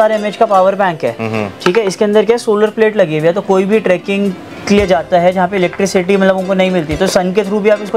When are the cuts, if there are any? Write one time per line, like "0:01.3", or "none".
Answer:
none